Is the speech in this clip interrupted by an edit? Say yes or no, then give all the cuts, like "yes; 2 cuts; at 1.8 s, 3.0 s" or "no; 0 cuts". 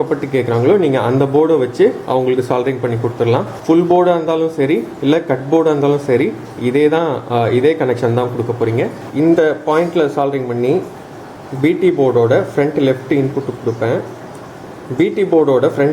yes; 2 cuts; at 3.5 s, 9.0 s